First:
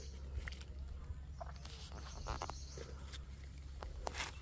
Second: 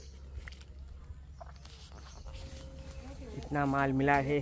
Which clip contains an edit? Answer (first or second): second